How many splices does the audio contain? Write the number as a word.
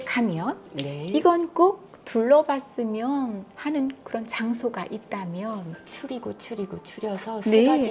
one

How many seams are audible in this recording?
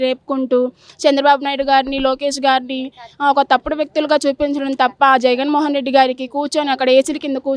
zero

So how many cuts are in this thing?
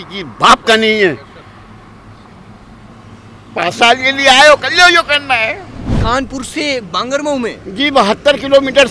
two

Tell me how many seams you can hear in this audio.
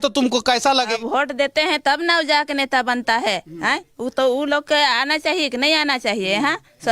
one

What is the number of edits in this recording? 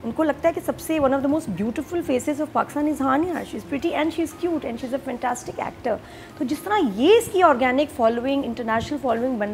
zero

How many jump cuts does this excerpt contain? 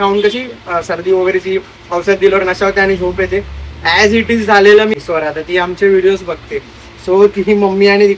one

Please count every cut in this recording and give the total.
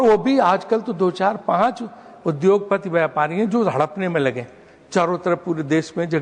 zero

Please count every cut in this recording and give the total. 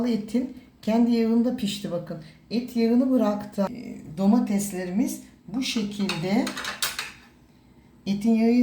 one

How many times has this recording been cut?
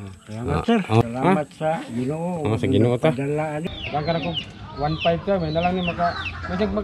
two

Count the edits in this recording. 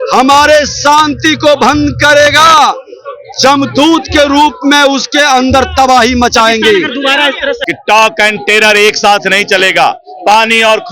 one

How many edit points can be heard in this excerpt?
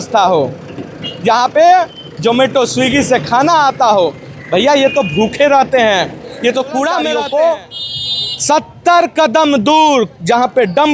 one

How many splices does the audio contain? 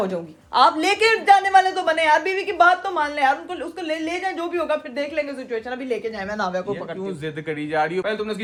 zero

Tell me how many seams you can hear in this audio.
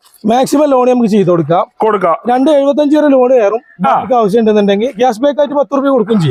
zero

